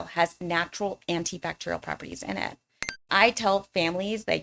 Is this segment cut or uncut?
cut